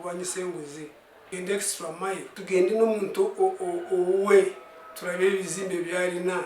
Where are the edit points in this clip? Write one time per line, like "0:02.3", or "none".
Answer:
0:01.1
0:02.3